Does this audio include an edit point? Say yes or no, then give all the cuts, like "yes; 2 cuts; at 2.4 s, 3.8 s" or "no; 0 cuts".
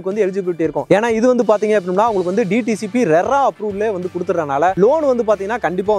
no; 0 cuts